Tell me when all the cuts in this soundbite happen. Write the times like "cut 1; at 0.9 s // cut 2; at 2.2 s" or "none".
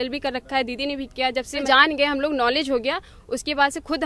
cut 1; at 1.6 s